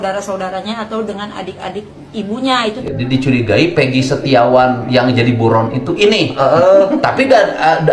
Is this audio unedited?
no; 1 cut; at 2.8 s

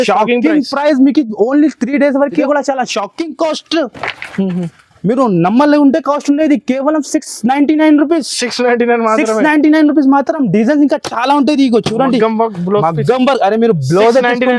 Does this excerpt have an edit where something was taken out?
yes; 1 cut; at 2.4 s

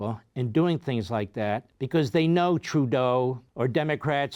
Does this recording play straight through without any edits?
no; 2 cuts; at 1.7 s, 3.5 s

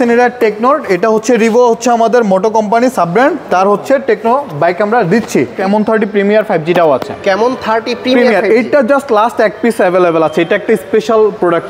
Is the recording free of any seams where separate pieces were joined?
no; 1 cut; at 5.5 s

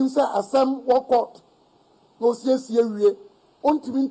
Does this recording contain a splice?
no; 0 cuts

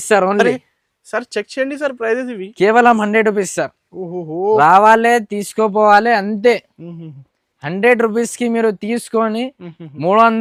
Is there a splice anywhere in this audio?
no; 0 cuts

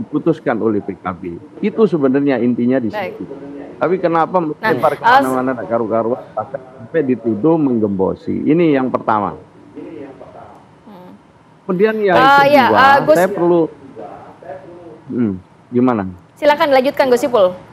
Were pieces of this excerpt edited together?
no; 0 cuts

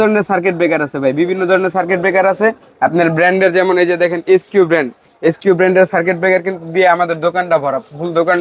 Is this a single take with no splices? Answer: yes; 0 cuts

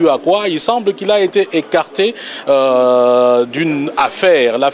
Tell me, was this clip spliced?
no; 0 cuts

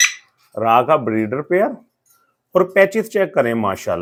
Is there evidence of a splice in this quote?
no; 0 cuts

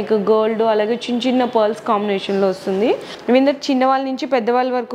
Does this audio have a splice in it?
yes; 1 cut; at 3.1 s

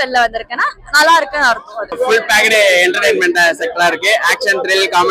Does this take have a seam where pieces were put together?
yes; 1 cut; at 1.9 s

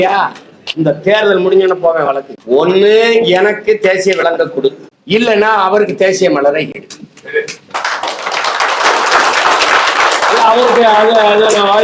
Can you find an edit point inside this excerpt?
no; 0 cuts

